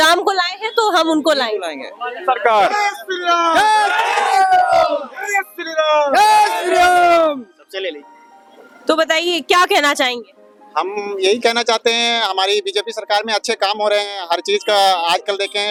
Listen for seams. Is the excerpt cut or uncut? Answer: uncut